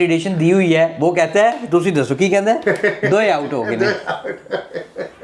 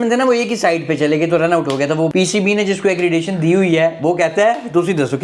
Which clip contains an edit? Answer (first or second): second